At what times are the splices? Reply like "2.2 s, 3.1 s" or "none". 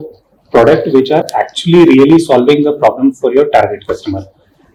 none

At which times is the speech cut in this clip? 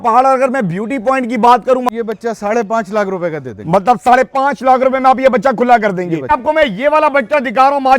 1.9 s, 6.3 s

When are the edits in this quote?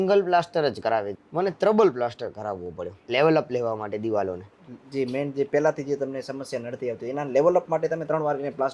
none

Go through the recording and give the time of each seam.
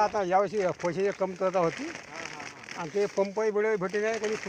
none

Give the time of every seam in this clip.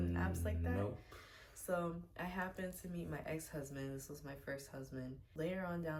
none

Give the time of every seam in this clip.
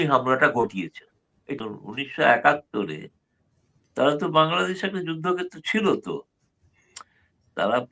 1.6 s

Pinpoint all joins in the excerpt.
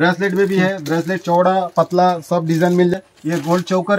2.9 s

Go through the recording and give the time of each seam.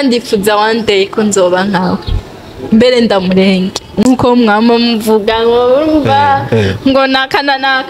none

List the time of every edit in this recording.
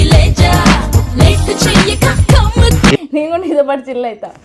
none

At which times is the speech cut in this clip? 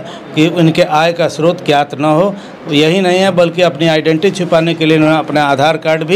none

